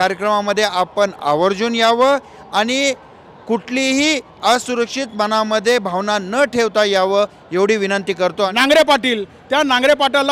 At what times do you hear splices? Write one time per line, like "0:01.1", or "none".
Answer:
0:08.5